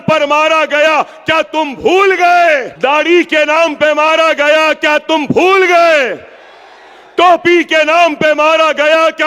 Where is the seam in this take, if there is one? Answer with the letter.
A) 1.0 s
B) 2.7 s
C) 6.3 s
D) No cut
B